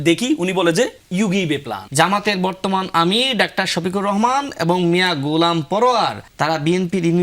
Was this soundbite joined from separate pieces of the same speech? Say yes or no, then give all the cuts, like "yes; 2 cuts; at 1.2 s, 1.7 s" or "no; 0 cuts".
yes; 2 cuts; at 1.6 s, 6.2 s